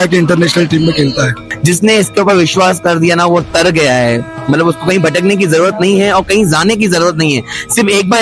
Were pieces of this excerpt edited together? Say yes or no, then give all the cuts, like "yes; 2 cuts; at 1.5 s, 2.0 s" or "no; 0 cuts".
yes; 1 cut; at 1.5 s